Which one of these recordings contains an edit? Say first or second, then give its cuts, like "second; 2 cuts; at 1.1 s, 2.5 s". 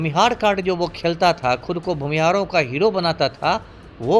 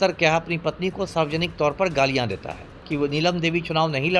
second; 1 cut; at 2.8 s